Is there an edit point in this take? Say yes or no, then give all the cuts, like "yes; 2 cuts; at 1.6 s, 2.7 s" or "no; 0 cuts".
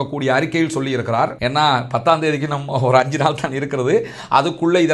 yes; 1 cut; at 1.4 s